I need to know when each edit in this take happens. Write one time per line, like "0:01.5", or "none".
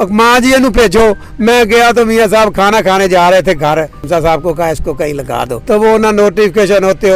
0:04.0
0:05.5